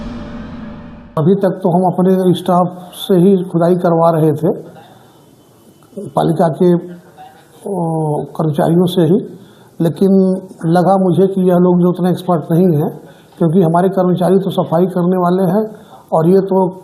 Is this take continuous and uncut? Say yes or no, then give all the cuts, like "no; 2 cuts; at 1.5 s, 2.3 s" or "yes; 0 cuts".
no; 1 cut; at 1.0 s